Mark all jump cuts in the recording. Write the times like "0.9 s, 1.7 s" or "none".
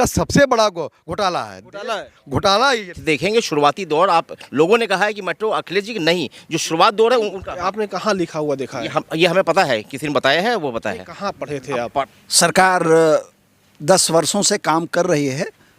3.0 s, 12.1 s